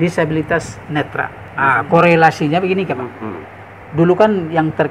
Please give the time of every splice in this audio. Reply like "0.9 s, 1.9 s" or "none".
1.4 s